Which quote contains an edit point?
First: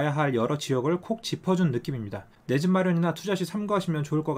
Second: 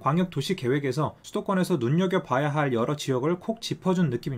second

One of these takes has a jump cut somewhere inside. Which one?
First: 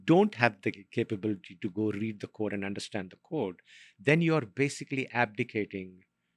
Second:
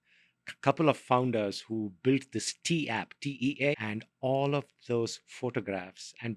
second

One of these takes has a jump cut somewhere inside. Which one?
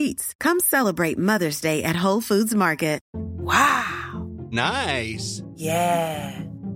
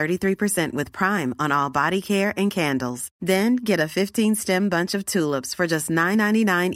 first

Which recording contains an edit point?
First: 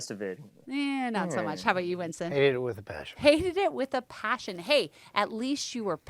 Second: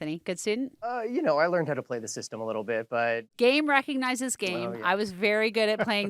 second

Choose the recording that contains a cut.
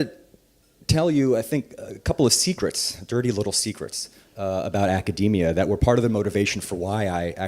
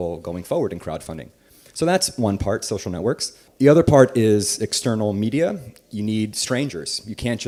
first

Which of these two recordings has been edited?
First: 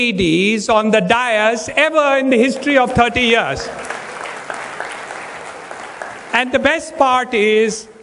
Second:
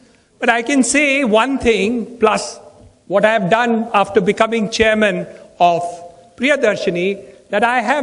second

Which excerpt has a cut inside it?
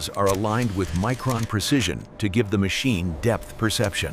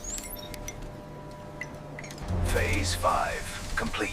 second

